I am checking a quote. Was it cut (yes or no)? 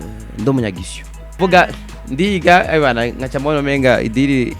yes